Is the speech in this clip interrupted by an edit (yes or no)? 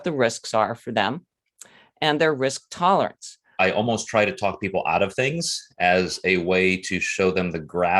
yes